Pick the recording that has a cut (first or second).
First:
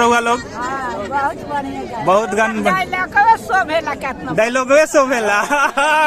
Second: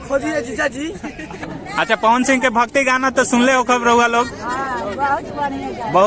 second